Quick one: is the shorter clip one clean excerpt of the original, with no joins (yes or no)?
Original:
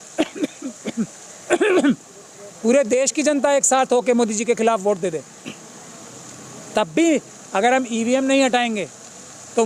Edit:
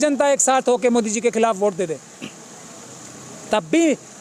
yes